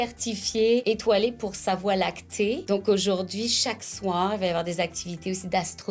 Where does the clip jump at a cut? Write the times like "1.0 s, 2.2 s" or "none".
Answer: 0.8 s, 2.6 s